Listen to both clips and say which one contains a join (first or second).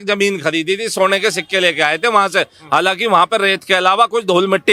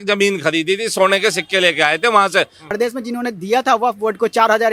second